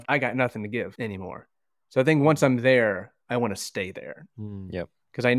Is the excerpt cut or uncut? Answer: uncut